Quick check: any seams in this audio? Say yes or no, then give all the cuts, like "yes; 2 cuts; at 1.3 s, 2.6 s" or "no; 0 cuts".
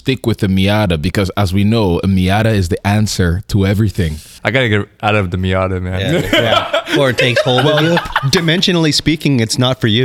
yes; 1 cut; at 4.3 s